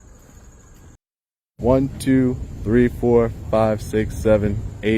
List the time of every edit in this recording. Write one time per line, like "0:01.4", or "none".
0:01.6